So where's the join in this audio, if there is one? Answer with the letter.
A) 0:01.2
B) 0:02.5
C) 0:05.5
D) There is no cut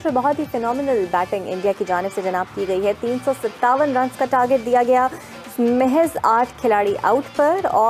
D